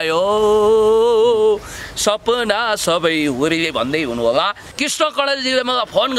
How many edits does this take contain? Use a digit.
1